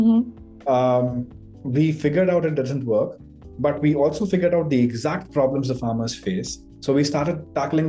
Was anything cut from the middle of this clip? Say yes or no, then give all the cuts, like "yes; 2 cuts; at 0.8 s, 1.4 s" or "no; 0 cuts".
no; 0 cuts